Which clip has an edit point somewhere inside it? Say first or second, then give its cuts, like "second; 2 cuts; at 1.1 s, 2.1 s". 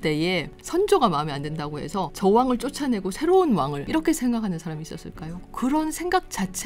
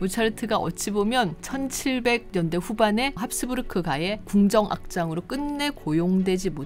first; 3 cuts; at 2.1 s, 3.8 s, 5.3 s